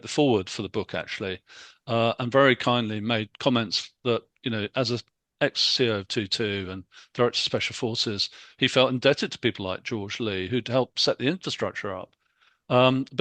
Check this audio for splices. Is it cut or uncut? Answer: uncut